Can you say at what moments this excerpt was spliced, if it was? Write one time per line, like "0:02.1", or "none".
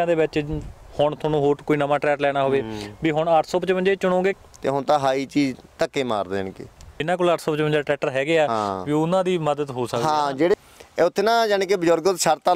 0:04.3
0:06.9
0:10.5